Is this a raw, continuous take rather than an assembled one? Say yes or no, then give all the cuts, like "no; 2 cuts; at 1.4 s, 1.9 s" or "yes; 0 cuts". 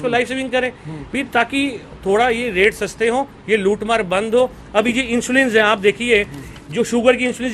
yes; 0 cuts